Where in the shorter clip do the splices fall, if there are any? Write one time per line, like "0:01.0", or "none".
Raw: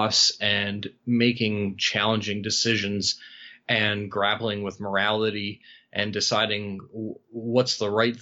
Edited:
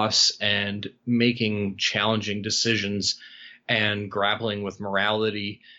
none